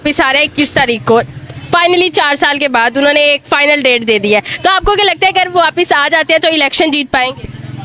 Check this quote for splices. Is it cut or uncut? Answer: uncut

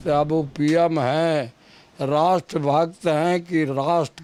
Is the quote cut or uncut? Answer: uncut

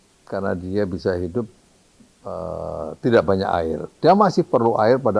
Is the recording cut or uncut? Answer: uncut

